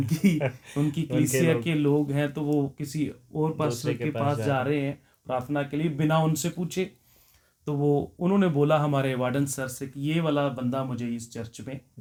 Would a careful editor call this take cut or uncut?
uncut